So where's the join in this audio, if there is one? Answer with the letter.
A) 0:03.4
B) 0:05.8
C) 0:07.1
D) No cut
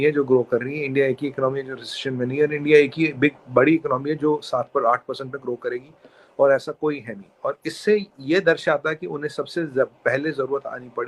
D